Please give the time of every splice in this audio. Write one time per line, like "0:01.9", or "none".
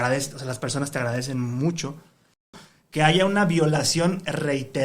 0:02.5